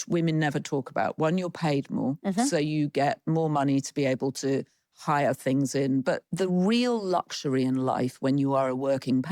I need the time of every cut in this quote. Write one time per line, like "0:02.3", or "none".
0:06.3